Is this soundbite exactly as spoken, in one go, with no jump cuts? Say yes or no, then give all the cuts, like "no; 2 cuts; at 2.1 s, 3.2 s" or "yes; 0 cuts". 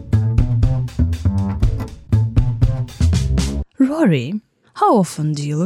no; 1 cut; at 3.7 s